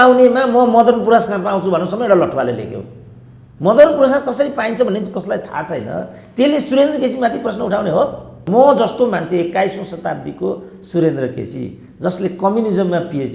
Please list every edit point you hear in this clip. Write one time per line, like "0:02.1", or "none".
0:08.5